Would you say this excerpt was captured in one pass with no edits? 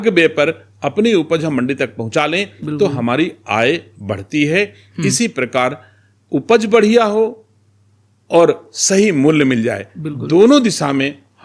yes; 0 cuts

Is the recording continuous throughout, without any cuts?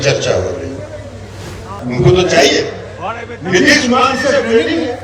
no; 1 cut; at 1.8 s

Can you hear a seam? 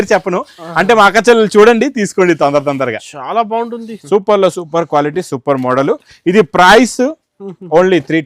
yes; 1 cut; at 3.9 s

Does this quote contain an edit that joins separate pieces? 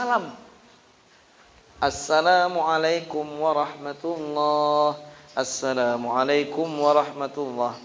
no; 0 cuts

